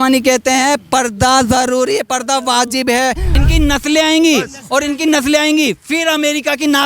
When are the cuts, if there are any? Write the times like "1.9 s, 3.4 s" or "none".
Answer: 3.4 s

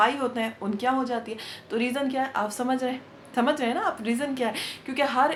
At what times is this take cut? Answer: none

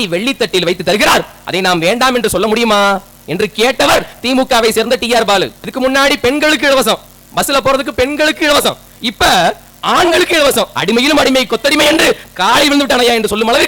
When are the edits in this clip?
5.6 s, 10.7 s

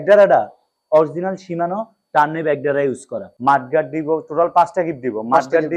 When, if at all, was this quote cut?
3.2 s

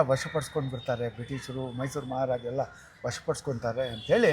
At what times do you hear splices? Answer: none

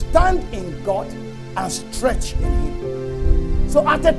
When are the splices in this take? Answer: none

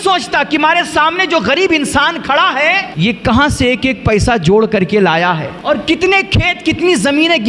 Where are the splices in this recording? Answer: 2.9 s, 5.5 s

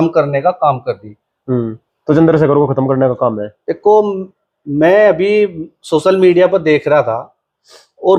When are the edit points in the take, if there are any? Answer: none

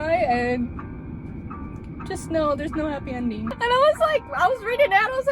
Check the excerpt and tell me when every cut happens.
3.5 s

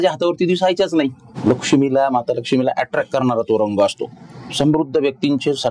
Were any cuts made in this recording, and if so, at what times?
1.2 s

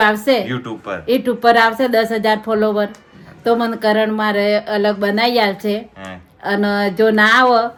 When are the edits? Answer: none

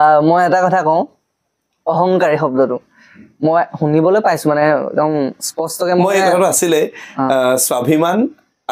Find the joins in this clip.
none

